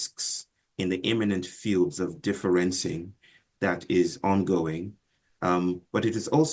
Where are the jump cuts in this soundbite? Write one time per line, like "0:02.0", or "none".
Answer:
none